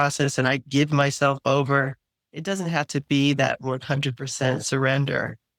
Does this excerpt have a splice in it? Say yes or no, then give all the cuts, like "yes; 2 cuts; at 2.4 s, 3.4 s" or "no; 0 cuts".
no; 0 cuts